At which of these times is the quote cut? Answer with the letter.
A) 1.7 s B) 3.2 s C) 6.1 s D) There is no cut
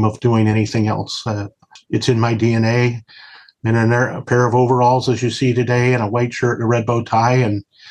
A